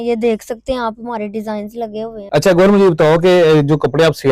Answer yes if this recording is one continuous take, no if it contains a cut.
no